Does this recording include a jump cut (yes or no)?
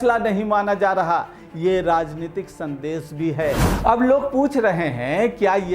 yes